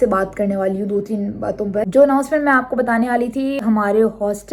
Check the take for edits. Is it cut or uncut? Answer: cut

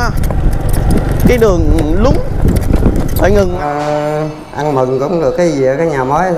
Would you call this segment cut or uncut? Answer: cut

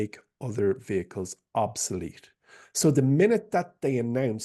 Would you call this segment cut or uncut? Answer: uncut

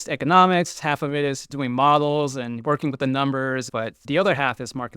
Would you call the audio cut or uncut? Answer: cut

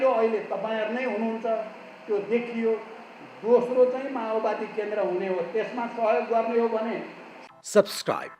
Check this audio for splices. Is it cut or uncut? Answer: cut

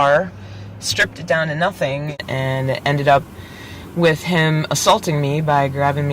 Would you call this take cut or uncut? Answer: cut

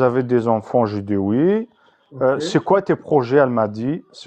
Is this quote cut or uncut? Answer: uncut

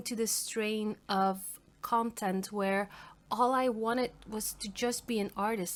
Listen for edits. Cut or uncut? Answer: uncut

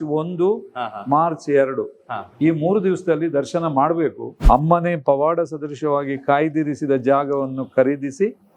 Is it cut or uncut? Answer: cut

